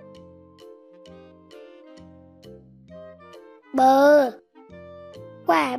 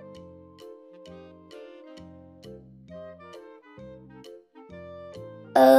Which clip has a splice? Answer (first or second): first